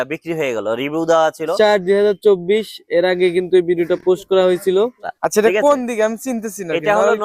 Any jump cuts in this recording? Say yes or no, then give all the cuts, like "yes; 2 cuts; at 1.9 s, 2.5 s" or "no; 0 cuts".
yes; 2 cuts; at 1.5 s, 5.1 s